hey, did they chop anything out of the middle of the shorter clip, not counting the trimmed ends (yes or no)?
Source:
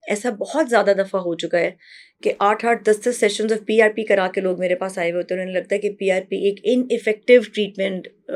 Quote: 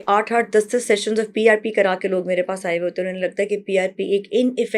no